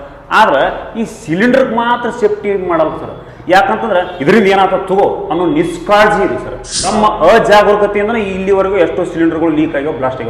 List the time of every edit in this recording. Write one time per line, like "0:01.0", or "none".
0:06.9